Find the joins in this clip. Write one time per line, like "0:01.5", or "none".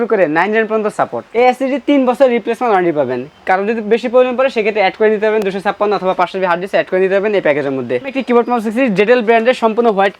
0:01.2
0:08.2